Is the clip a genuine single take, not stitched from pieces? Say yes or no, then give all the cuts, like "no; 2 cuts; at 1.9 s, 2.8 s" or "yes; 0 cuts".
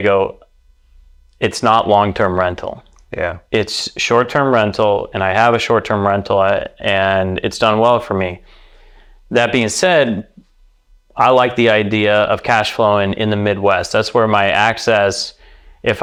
yes; 0 cuts